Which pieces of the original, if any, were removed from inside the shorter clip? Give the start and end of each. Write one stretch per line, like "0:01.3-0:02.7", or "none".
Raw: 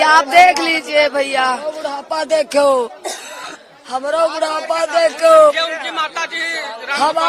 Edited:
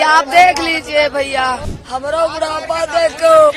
0:01.7-0:03.7